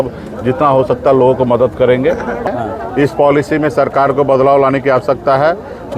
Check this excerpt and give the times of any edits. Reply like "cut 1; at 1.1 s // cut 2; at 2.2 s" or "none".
cut 1; at 2.4 s